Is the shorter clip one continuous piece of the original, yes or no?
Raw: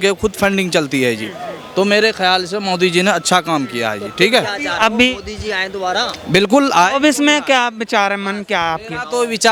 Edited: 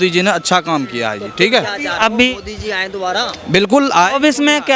yes